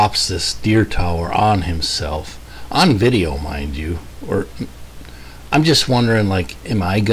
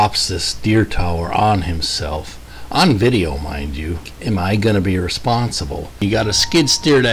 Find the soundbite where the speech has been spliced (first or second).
second